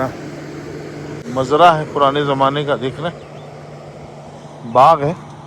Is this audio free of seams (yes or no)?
no